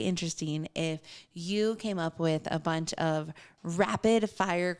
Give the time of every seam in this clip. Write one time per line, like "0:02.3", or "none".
none